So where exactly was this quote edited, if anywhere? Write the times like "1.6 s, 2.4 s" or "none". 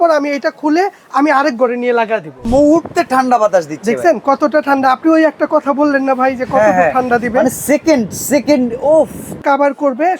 2.4 s, 9.4 s